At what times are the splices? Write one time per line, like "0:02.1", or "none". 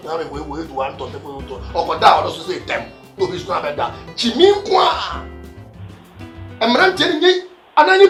none